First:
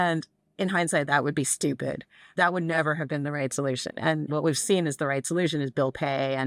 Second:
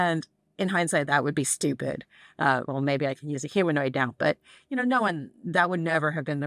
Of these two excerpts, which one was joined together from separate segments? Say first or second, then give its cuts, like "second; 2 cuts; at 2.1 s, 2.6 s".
first; 2 cuts; at 2.2 s, 4.3 s